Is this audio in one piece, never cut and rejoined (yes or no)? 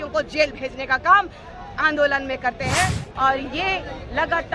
no